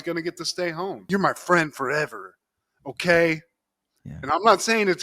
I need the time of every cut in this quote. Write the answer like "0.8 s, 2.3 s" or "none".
1.0 s